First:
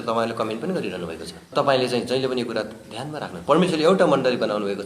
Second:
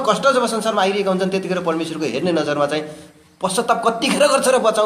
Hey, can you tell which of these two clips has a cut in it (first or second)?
first